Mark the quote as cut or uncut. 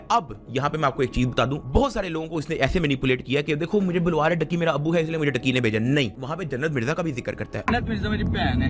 uncut